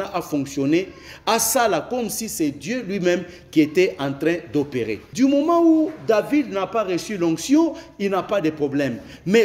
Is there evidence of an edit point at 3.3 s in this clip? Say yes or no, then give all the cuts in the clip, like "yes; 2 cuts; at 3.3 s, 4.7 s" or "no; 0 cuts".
no; 1 cut; at 5.0 s